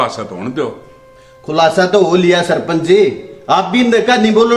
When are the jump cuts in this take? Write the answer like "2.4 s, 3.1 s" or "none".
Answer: none